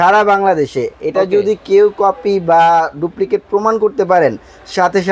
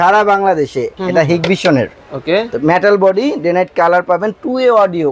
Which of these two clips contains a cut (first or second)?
second